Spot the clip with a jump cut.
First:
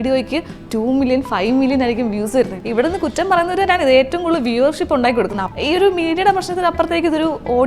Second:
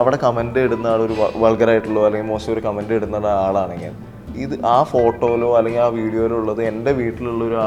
first; 2 cuts; at 2.6 s, 5.4 s

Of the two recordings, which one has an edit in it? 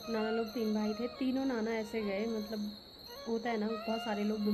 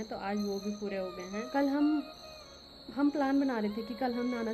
second; 1 cut; at 1.4 s

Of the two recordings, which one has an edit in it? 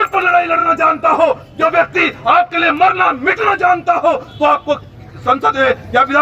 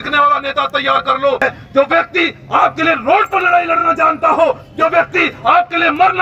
second; 1 cut; at 1.4 s

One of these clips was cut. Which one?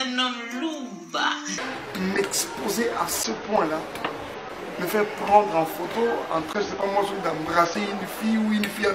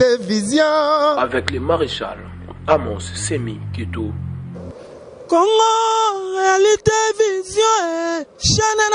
first; 1 cut; at 1.6 s

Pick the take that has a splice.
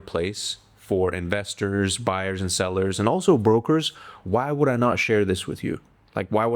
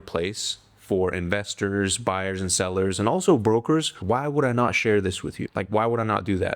second; 2 cuts; at 3.9 s, 5.4 s

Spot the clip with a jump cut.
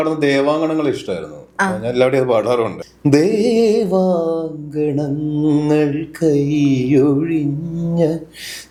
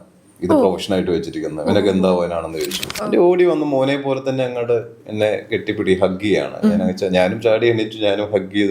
second; 1 cut; at 2.9 s

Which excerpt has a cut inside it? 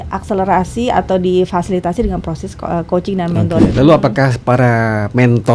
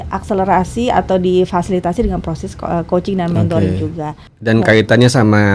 first; 1 cut; at 3.7 s

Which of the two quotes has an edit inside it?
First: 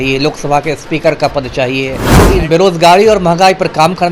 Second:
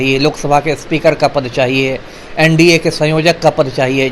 first; 1 cut; at 2.2 s

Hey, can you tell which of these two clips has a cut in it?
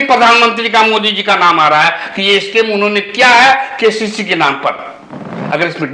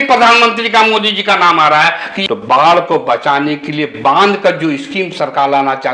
second; 1 cut; at 2.1 s

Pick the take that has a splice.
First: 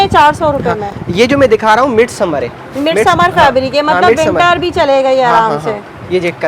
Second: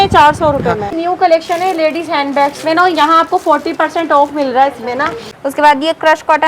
second; 2 cuts; at 0.9 s, 5.3 s

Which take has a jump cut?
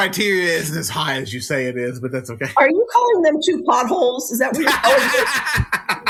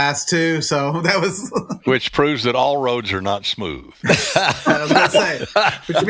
second; 1 cut; at 3.9 s

